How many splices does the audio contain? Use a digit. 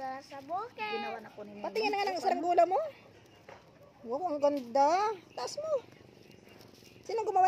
0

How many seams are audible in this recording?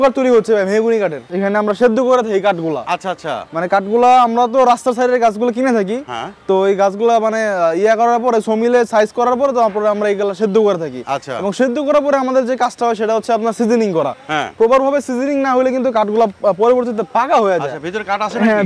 1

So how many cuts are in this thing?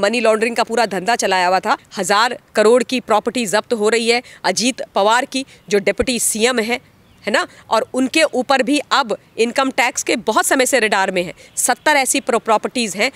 1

